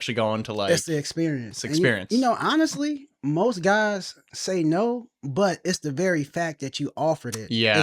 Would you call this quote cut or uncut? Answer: uncut